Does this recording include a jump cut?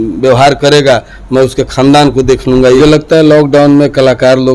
yes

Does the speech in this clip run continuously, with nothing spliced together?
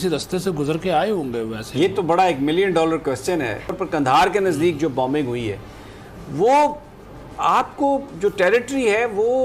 no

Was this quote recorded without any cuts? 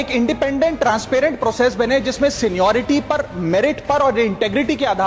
yes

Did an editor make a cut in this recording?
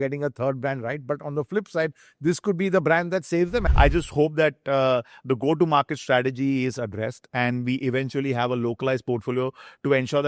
yes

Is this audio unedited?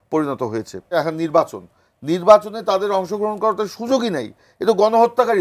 no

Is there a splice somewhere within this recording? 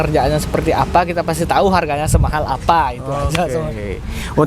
no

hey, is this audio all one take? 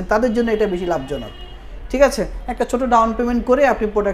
yes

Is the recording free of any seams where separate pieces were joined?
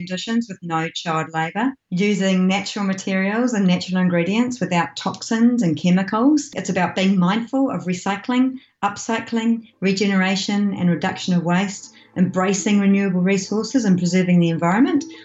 yes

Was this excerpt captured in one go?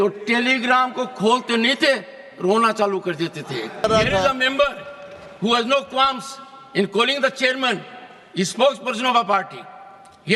no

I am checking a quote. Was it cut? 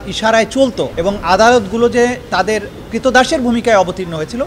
no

